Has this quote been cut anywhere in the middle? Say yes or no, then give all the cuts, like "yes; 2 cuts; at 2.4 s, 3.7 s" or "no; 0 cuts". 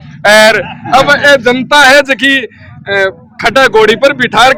no; 0 cuts